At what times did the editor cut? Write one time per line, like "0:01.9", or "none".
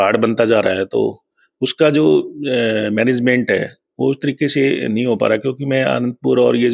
none

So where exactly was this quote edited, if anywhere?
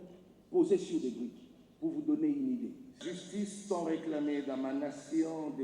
0:03.0

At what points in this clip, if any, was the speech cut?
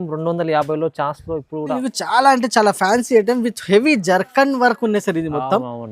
0:01.8

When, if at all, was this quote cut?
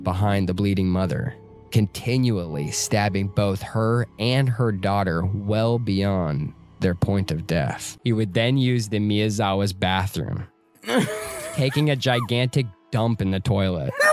0:07.9

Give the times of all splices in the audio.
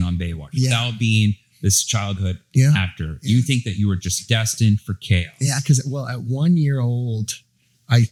none

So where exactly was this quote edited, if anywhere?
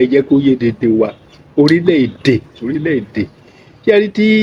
none

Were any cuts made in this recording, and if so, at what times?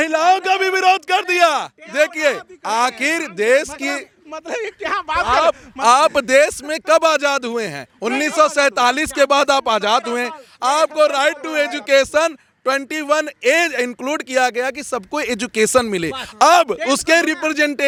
none

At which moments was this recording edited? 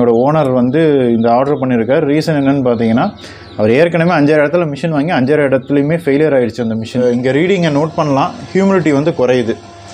0:07.0

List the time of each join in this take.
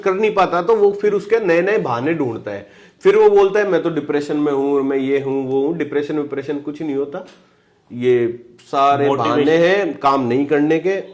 none

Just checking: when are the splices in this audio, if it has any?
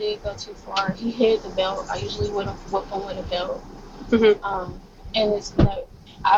none

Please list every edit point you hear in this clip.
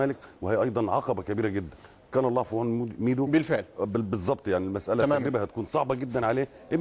0:05.8

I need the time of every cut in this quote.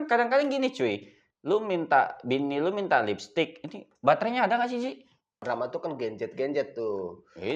0:05.4

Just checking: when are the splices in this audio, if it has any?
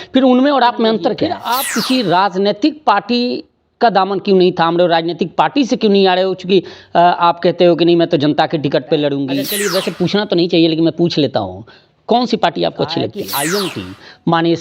0:01.3
0:09.5
0:13.2

